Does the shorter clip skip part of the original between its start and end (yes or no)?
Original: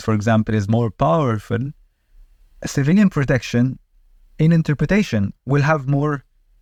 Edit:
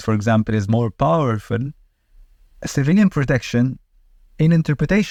no